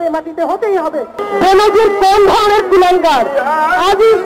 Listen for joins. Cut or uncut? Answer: cut